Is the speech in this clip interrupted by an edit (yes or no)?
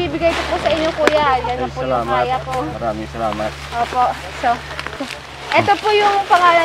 yes